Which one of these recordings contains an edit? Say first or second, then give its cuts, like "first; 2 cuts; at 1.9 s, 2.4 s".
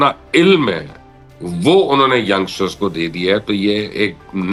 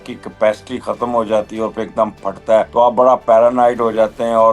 second; 1 cut; at 2.7 s